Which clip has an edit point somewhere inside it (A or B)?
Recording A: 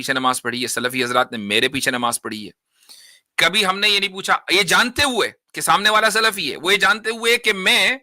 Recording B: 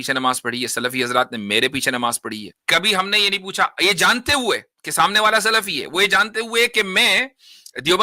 B